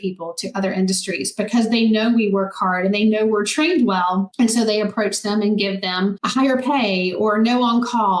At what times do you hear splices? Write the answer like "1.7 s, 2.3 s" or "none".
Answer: none